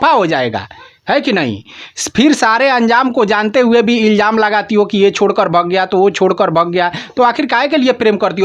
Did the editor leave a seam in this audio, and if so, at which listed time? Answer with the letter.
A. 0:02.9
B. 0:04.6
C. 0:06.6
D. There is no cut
D